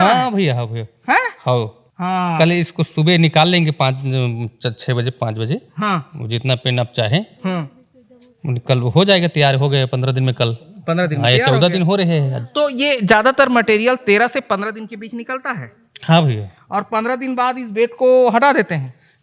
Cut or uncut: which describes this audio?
uncut